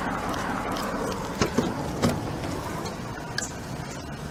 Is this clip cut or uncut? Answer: uncut